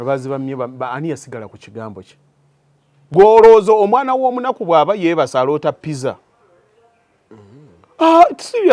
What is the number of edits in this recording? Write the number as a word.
one